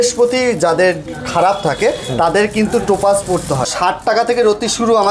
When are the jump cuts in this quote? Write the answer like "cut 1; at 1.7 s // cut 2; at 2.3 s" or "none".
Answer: cut 1; at 3.7 s